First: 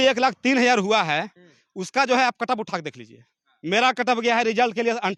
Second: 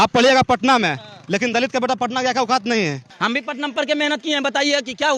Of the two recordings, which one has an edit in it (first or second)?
second